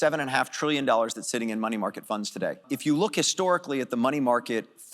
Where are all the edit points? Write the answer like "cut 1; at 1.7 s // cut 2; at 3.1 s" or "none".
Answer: cut 1; at 2.6 s